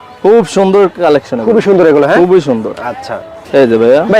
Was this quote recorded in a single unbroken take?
yes; 0 cuts

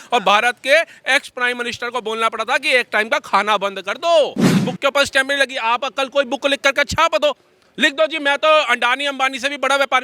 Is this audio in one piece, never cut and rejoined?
no; 1 cut; at 4.7 s

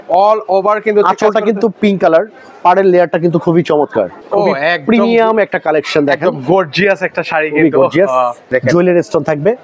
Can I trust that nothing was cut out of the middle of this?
no; 2 cuts; at 4.2 s, 8.5 s

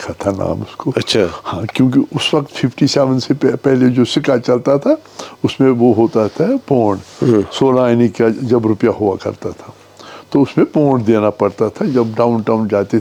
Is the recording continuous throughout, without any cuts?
yes; 0 cuts

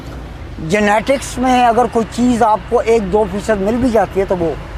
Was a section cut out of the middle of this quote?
no; 0 cuts

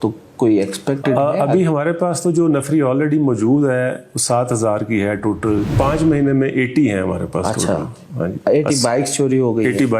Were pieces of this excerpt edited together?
yes; 1 cut; at 5.7 s

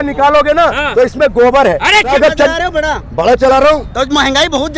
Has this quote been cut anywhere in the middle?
yes; 1 cut; at 2.1 s

